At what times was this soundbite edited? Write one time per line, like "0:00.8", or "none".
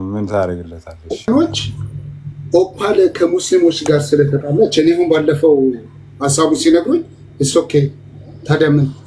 0:01.2